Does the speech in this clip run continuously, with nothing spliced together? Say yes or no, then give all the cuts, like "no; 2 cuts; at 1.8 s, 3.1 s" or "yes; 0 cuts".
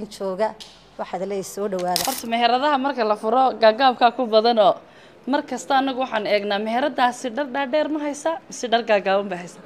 no; 1 cut; at 2.0 s